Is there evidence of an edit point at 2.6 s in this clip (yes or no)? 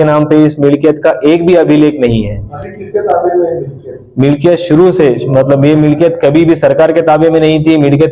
no